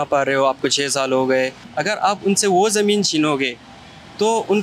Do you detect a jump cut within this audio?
yes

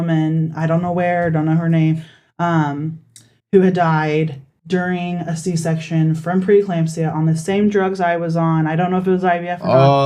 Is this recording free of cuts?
yes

